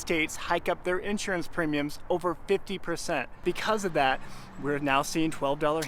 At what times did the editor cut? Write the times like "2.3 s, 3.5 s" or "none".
3.4 s